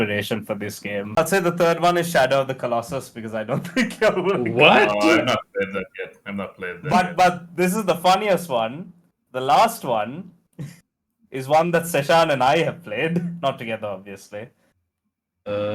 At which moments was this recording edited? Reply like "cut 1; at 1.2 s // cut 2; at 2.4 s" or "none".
cut 1; at 1.1 s